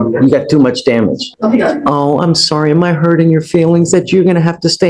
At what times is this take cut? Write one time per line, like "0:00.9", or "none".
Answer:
0:01.3

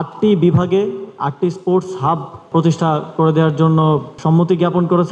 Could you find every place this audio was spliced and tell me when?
0:02.5
0:04.1

